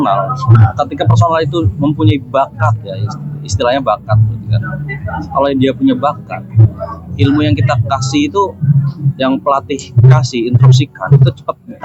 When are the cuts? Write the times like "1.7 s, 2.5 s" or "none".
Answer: none